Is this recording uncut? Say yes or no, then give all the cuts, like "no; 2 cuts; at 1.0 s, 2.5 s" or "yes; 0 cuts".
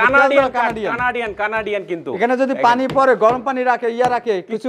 yes; 0 cuts